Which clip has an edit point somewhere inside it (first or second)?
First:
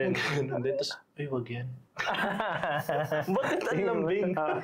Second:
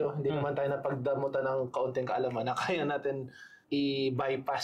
second